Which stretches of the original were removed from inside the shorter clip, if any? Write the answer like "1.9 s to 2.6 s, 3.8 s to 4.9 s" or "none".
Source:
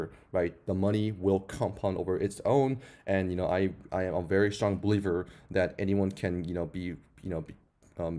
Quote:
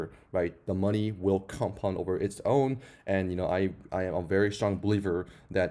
none